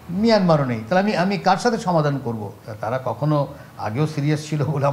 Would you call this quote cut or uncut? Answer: uncut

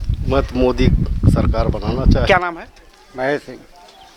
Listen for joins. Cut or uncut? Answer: cut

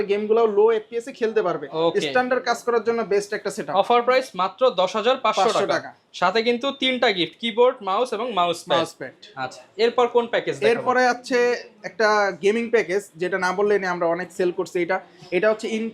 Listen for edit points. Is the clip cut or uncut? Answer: uncut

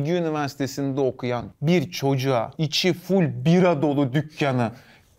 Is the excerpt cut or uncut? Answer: cut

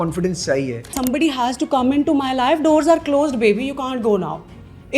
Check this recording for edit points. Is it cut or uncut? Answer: cut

